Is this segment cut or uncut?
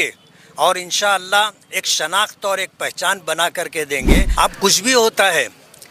cut